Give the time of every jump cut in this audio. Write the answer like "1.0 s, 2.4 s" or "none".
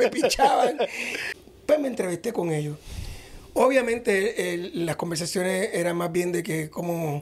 1.2 s